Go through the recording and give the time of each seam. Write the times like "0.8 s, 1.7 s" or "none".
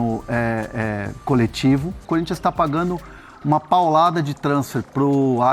2.0 s